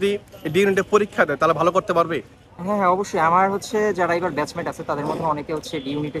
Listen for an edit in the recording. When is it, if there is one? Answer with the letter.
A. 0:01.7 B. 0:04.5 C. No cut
C